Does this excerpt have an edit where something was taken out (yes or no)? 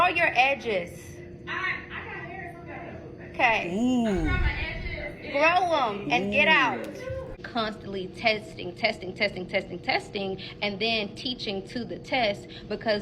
yes